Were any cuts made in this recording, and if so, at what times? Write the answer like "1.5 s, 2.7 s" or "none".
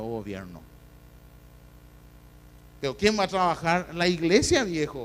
3.3 s